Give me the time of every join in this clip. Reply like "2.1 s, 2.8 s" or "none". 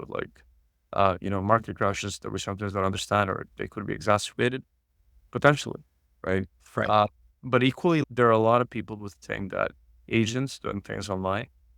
8.0 s